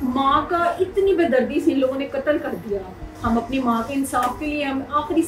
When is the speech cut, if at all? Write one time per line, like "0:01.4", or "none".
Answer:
none